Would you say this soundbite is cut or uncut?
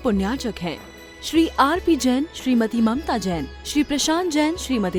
uncut